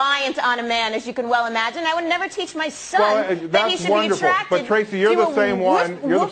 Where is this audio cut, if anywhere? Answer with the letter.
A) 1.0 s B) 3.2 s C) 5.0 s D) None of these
D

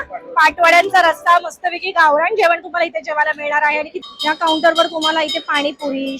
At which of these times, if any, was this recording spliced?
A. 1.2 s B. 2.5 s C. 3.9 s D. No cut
C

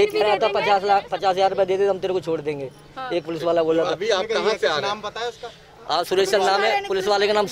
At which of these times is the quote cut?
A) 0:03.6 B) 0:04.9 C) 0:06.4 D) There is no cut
D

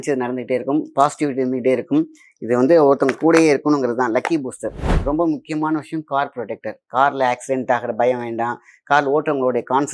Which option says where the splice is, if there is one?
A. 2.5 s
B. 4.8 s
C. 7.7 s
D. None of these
B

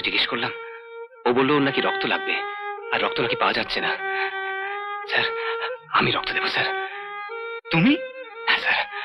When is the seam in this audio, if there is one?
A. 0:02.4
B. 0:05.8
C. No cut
C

